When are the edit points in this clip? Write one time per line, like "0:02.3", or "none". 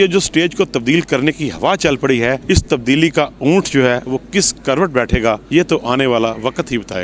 0:02.4
0:05.4

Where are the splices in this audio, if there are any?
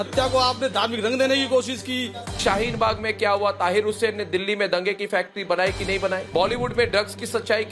0:06.2

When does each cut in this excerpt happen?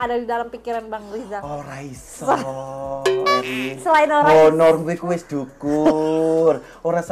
none

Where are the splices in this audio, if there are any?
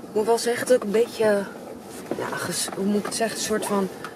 none

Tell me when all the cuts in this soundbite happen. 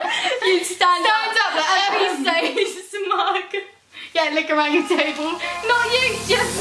none

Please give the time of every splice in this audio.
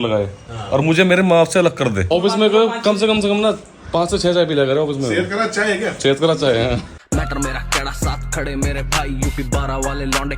0:02.1
0:06.9

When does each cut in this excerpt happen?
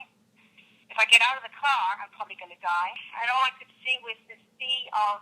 0:03.0

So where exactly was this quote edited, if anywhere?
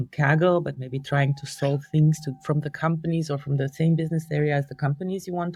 none

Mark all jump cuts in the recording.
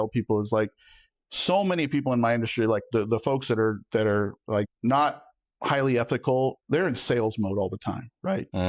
0:04.7
0:06.6

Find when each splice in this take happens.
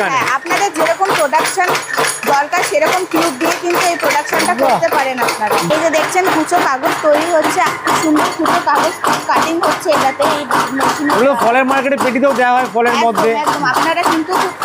0:05.7
0:07.7

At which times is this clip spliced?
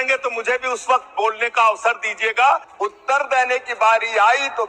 0:02.7

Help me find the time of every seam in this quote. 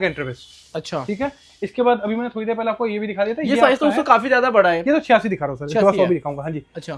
none

